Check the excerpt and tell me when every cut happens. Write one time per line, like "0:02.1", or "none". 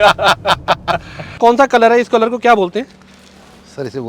0:01.4